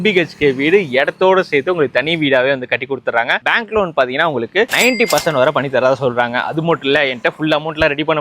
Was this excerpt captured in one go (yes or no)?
yes